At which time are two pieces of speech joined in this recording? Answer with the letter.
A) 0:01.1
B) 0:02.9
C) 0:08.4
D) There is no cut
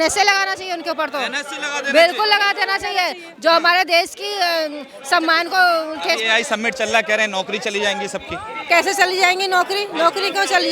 D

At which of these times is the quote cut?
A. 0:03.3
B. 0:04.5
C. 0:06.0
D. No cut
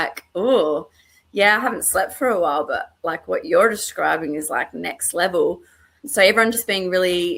C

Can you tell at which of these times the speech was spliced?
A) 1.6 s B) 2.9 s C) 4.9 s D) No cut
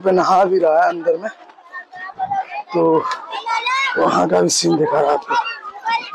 D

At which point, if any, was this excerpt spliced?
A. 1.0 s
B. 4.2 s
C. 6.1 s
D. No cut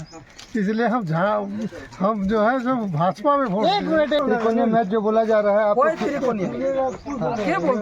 B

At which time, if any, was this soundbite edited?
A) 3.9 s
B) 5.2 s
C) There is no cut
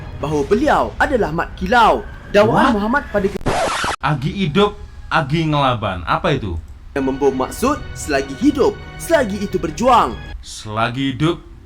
A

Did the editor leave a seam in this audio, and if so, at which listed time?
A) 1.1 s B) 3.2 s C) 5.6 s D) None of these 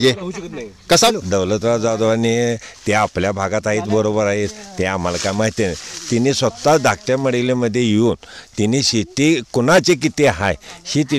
A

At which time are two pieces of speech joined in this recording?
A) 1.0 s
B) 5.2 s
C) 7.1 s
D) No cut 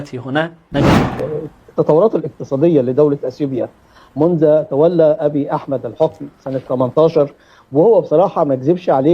A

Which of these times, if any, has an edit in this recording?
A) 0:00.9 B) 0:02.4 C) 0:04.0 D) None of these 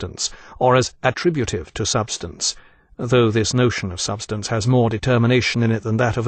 C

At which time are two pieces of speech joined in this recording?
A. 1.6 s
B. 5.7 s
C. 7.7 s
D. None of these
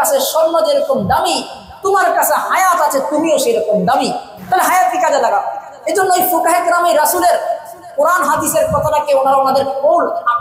D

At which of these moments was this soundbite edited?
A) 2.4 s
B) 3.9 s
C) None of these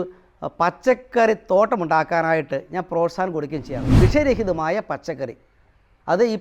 B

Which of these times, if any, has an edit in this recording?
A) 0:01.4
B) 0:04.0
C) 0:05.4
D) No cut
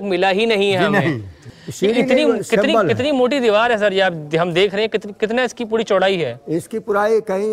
A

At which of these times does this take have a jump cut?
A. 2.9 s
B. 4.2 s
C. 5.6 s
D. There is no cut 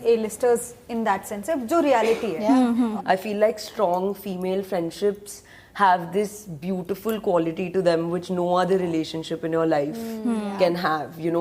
A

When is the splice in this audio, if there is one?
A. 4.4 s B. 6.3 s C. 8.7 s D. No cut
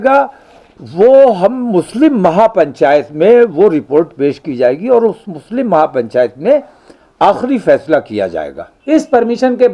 C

